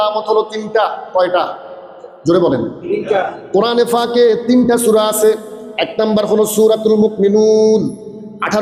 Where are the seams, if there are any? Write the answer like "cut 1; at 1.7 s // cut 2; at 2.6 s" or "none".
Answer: none